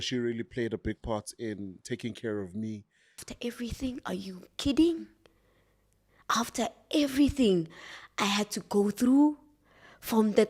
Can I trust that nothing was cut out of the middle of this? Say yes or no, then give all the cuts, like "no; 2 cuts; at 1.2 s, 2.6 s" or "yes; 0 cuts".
no; 1 cut; at 3.2 s